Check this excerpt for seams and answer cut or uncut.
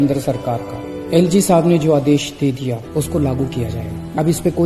uncut